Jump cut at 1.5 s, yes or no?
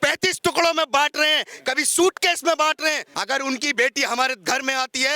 no